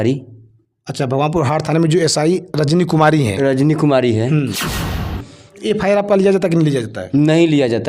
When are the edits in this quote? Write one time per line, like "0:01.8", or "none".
0:05.0